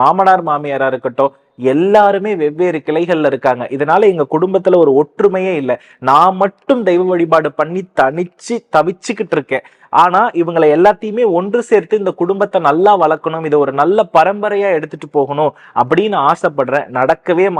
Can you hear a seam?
no; 0 cuts

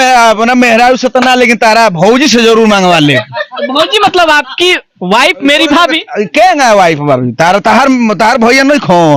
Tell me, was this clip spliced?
no; 0 cuts

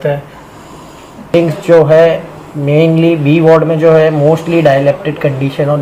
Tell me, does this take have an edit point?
yes; 1 cut; at 1.3 s

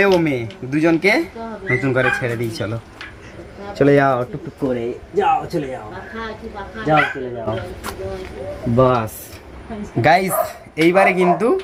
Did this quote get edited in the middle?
no; 0 cuts

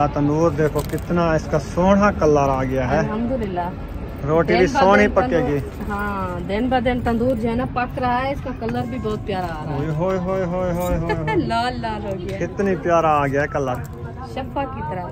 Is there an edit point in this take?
no; 0 cuts

